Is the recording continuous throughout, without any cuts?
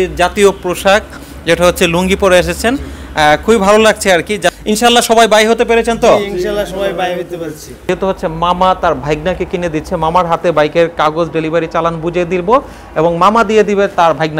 no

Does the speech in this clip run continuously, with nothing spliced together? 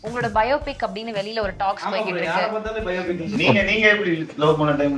no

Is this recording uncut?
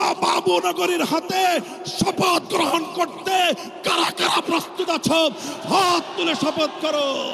yes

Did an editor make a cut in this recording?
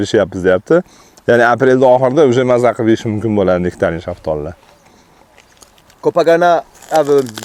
no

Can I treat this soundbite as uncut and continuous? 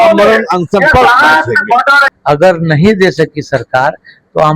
no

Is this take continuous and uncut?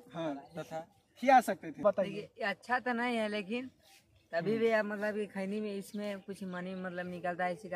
no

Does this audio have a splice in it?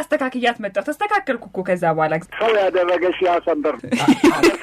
yes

